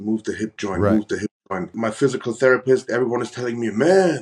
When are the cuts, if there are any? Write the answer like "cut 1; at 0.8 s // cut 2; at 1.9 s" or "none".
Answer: cut 1; at 1.7 s